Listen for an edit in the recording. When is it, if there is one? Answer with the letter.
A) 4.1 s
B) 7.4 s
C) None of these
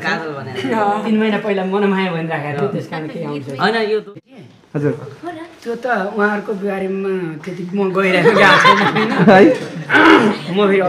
A